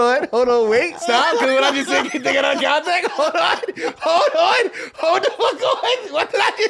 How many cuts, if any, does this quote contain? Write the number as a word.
one